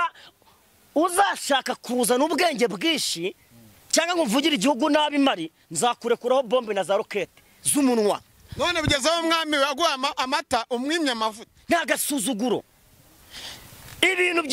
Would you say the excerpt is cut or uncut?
uncut